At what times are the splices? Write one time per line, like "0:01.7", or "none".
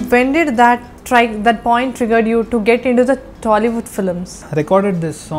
0:00.9
0:04.4